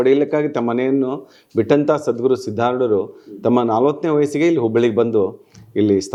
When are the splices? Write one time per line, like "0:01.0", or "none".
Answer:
none